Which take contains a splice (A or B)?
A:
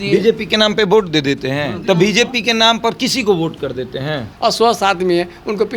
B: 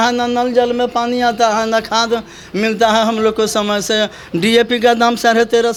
A